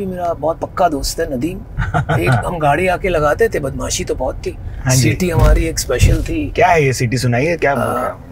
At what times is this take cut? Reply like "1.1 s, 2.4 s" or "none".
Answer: 1.7 s, 6.5 s